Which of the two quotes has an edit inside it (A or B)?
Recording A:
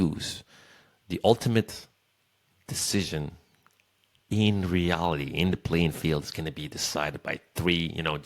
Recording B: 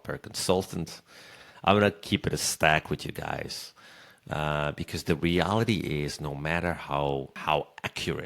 B